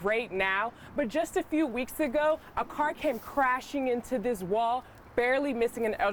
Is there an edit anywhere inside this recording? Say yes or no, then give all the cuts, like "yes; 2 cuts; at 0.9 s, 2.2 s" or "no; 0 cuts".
no; 0 cuts